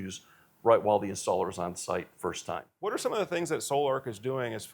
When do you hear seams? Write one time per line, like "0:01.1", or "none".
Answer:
0:02.9